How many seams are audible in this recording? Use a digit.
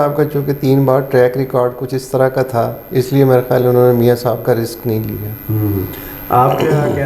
0